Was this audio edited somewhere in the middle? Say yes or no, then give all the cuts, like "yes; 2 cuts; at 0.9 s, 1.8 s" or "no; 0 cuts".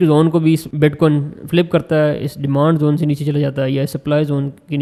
no; 0 cuts